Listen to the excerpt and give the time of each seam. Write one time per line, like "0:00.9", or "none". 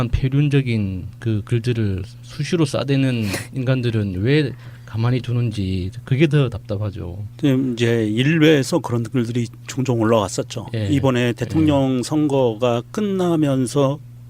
0:03.0